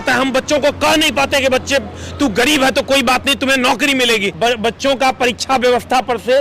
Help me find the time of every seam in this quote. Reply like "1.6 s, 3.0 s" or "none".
4.3 s